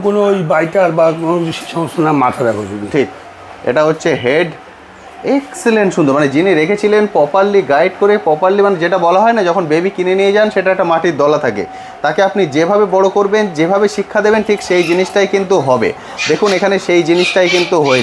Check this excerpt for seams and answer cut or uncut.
uncut